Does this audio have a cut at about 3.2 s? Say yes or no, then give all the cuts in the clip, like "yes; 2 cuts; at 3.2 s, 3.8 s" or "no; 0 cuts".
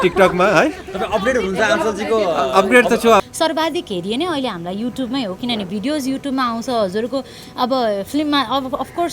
yes; 1 cut; at 3.2 s